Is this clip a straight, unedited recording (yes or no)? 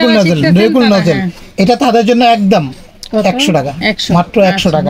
yes